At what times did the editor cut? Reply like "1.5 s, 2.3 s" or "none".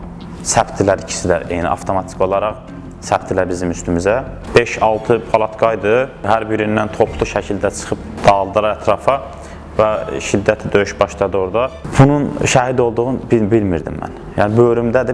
4.4 s, 6.3 s, 8.1 s, 11.8 s